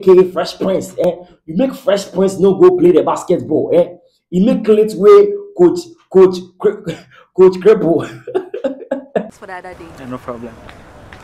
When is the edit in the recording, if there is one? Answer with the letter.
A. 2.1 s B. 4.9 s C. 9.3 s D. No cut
C